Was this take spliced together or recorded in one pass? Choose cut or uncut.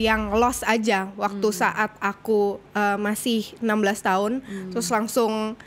uncut